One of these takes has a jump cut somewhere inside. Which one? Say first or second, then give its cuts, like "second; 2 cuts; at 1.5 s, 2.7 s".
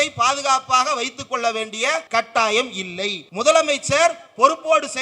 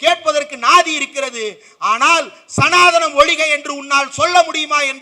first; 2 cuts; at 2.0 s, 3.2 s